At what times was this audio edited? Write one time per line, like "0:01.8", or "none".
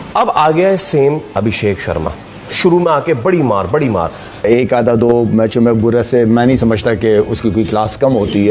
0:04.4